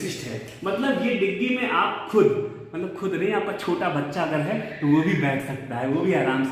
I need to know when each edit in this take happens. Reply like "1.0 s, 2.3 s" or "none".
none